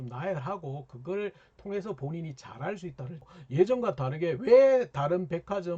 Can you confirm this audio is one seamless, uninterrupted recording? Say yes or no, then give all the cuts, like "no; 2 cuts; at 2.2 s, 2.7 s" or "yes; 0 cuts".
no; 1 cut; at 3.3 s